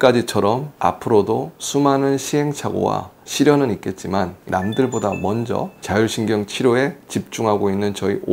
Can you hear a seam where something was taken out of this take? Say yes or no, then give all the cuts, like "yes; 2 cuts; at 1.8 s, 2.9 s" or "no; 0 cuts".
no; 0 cuts